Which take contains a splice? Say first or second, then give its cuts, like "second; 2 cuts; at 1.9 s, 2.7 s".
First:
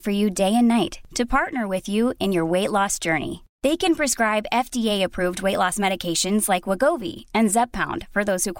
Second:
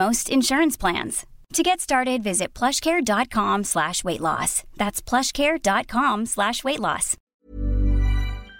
second; 1 cut; at 7.3 s